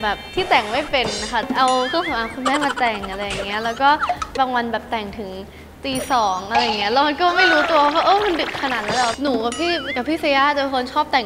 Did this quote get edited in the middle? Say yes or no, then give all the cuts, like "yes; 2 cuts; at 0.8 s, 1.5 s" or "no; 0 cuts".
yes; 2 cuts; at 4.4 s, 9.2 s